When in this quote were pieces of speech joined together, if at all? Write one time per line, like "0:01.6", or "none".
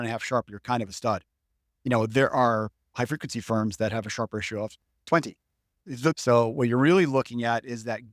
0:06.2